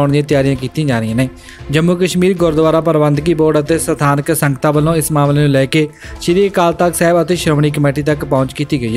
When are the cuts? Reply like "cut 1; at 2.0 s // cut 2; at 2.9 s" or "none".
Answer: none